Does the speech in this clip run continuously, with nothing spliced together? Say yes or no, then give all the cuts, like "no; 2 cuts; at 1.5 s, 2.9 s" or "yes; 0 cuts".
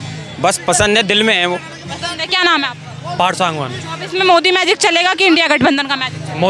yes; 0 cuts